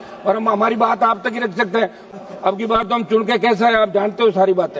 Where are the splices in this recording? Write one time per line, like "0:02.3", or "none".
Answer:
0:02.0

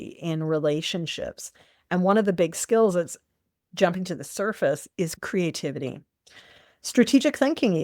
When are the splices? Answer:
0:05.2

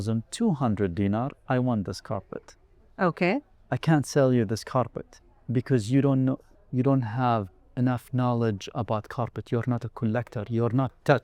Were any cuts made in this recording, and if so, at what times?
none

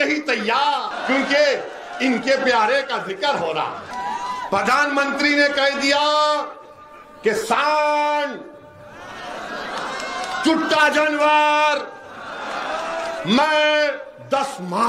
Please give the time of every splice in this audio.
0:00.9
0:03.9

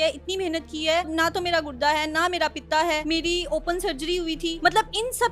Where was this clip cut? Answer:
0:01.1
0:03.0
0:04.6

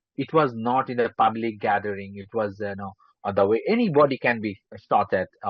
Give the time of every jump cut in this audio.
none

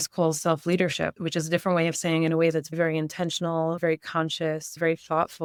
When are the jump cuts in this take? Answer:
none

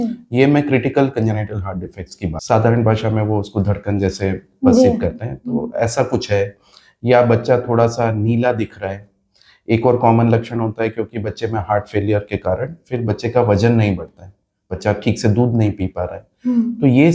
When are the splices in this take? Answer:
0:02.4

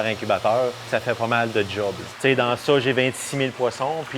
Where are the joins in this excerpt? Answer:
0:00.9
0:02.1

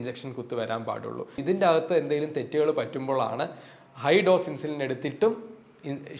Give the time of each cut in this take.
0:01.4

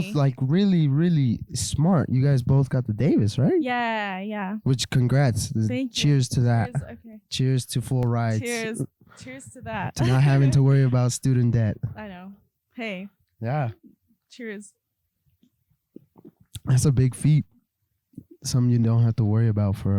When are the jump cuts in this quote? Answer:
none

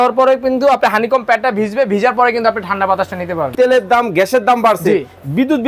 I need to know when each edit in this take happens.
0:03.4

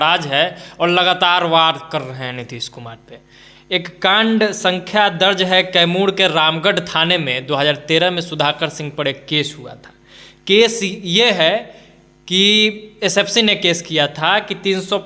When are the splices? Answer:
none

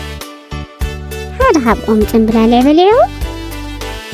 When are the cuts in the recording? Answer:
0:01.0
0:03.1

